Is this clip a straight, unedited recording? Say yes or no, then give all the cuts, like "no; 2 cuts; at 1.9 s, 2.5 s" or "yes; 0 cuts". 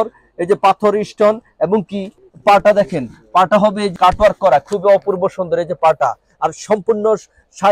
no; 2 cuts; at 2.2 s, 3.9 s